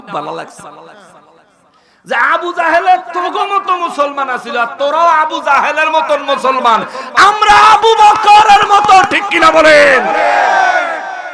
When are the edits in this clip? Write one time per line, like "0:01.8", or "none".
none